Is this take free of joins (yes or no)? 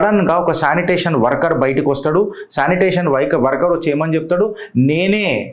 yes